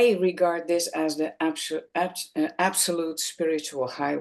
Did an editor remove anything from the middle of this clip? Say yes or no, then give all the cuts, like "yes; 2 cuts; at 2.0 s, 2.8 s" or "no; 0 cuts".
no; 0 cuts